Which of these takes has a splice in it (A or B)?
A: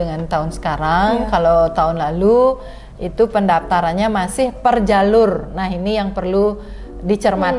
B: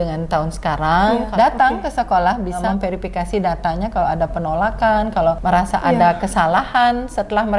B